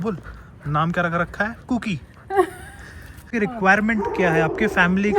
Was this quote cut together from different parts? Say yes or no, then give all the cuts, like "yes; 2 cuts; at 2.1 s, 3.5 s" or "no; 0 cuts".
yes; 1 cut; at 3.3 s